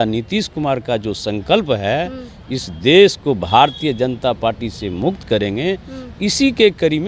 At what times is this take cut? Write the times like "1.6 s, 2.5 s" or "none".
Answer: none